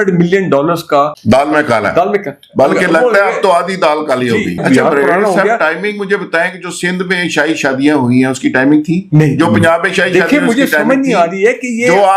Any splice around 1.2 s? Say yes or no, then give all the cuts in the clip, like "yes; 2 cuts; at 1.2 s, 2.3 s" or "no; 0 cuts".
yes; 2 cuts; at 1.2 s, 4.6 s